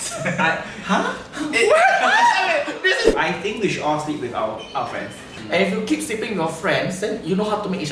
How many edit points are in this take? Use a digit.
2